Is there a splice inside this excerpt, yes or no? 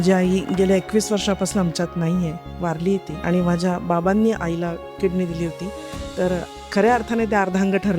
yes